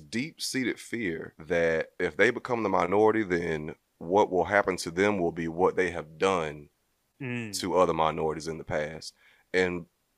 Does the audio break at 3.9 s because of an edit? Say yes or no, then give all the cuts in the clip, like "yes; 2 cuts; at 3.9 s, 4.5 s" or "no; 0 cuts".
no; 2 cuts; at 1.3 s, 1.9 s